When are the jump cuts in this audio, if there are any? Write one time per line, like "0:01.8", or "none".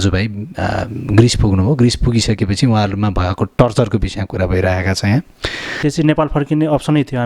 0:05.8